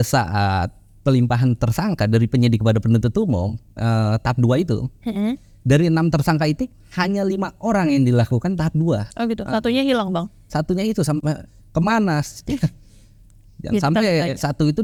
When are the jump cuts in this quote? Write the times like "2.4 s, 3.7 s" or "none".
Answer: none